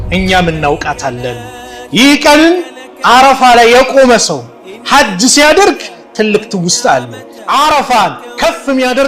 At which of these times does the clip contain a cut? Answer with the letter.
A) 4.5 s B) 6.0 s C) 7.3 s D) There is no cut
C